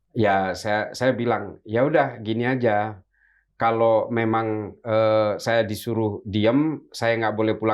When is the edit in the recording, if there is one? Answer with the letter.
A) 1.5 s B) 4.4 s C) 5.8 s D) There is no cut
D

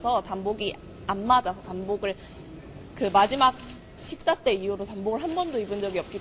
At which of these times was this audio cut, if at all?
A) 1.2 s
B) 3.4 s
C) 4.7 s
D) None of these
B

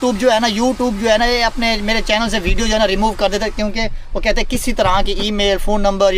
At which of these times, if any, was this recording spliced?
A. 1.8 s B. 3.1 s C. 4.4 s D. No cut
D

